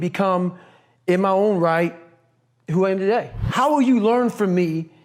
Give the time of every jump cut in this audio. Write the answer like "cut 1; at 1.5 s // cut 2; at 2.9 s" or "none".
cut 1; at 3.4 s